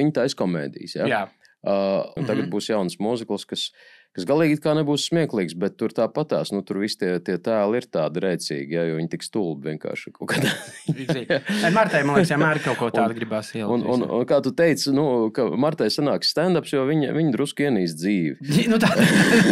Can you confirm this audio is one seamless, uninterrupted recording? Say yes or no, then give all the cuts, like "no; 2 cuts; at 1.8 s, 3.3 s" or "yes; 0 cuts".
no; 1 cut; at 2.2 s